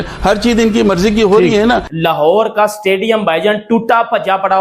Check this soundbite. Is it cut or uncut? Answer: cut